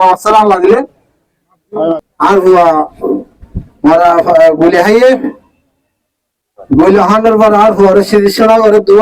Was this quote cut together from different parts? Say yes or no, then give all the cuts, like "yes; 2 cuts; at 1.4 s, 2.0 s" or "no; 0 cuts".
yes; 1 cut; at 1.9 s